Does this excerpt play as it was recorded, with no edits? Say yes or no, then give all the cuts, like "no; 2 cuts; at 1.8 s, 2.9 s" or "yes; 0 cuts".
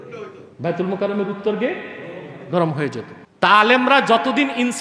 no; 1 cut; at 3.2 s